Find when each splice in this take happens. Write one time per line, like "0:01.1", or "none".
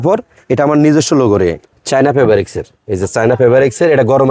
0:01.6